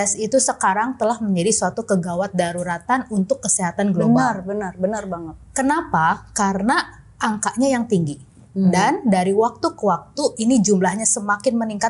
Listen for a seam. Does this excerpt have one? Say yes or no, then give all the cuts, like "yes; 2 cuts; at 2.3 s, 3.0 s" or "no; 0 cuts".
no; 0 cuts